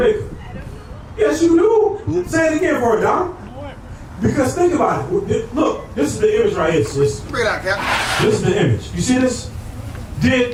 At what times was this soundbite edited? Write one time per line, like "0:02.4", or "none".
none